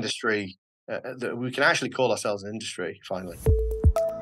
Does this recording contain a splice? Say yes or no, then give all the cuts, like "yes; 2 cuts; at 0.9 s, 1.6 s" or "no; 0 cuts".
yes; 1 cut; at 3.3 s